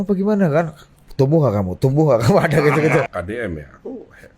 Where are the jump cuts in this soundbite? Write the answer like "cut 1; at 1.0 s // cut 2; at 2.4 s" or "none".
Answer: cut 1; at 3.1 s